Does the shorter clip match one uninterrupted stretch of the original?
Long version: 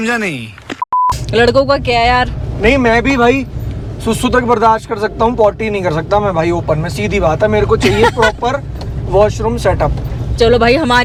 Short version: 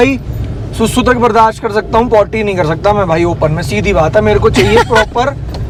yes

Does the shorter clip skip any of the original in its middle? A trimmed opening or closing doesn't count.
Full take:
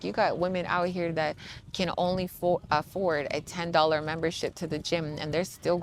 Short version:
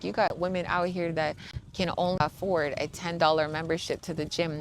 yes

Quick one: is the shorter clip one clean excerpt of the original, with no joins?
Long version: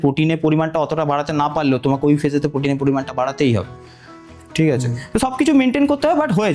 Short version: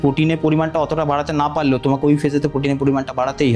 yes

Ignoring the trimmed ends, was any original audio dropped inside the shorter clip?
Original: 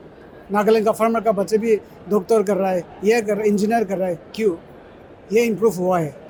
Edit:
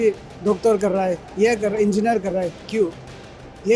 no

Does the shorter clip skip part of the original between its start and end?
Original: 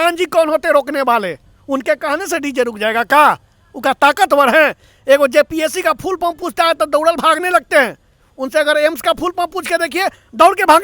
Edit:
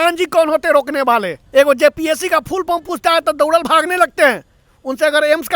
yes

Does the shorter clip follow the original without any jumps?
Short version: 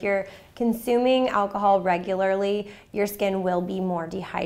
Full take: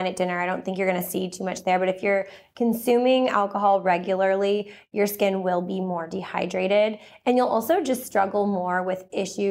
yes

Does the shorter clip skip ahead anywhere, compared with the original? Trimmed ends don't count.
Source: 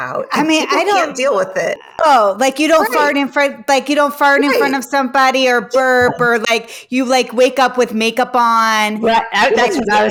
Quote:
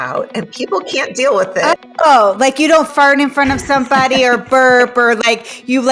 yes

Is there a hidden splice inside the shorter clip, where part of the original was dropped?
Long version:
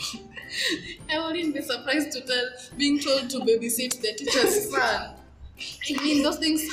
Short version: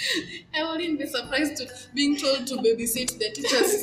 yes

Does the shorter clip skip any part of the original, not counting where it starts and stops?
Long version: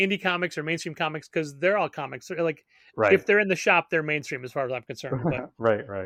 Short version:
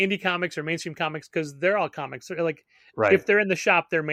no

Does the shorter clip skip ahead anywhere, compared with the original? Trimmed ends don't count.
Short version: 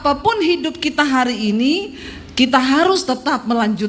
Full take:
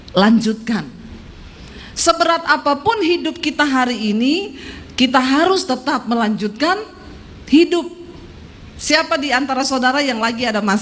no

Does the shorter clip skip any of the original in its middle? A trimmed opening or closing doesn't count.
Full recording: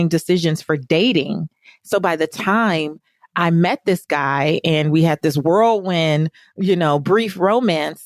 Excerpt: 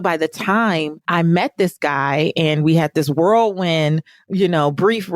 yes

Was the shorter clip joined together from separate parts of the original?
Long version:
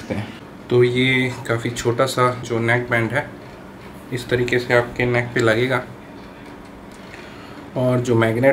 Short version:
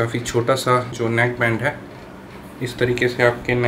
no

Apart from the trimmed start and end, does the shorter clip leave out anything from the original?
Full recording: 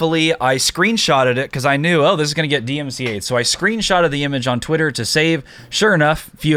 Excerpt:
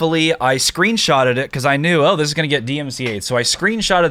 no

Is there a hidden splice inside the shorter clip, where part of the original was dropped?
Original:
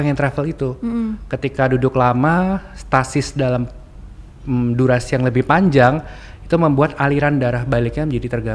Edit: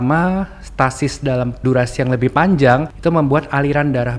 yes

